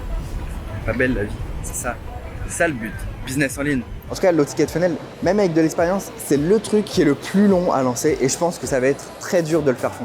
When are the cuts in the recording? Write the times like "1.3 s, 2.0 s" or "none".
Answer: 4.0 s, 6.9 s

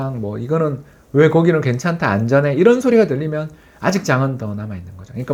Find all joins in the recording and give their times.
none

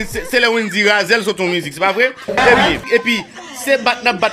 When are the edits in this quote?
2.9 s

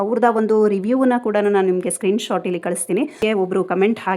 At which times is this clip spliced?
3.2 s

